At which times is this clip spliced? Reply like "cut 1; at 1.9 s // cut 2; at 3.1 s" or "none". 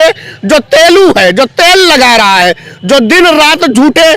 none